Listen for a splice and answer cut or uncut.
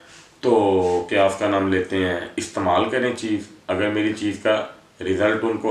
uncut